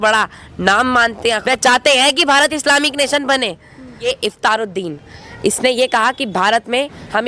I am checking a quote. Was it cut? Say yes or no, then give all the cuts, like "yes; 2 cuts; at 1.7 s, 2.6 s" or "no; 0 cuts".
yes; 2 cuts; at 1.4 s, 4.0 s